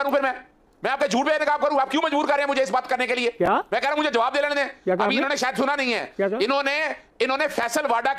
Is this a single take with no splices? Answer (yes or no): yes